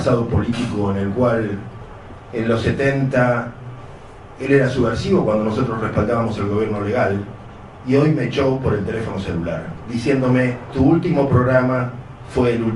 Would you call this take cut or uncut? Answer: cut